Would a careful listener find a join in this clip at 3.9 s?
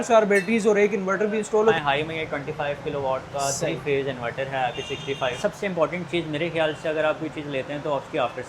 no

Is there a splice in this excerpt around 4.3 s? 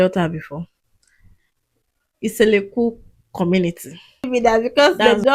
yes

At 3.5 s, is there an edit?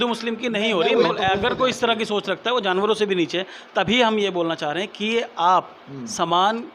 no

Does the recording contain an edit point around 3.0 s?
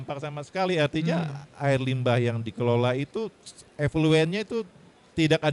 no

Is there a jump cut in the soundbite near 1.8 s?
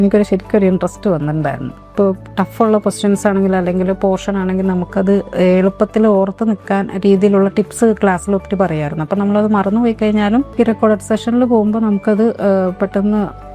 yes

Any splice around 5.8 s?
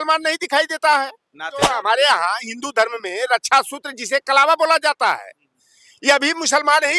no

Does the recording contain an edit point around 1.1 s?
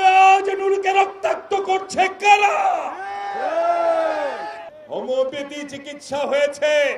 no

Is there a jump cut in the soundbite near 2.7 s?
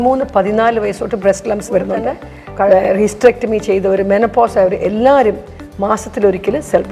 yes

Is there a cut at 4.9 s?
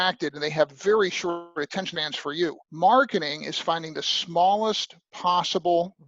no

